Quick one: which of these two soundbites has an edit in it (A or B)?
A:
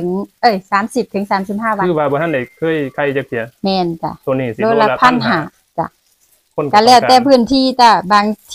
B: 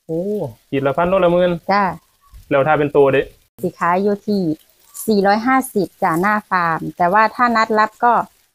B